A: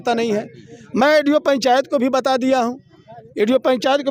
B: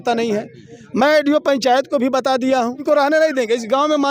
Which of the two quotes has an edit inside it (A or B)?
B